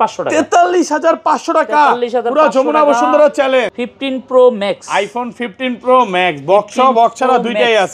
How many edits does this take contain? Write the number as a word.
one